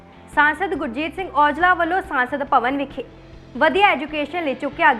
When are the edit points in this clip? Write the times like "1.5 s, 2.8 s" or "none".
none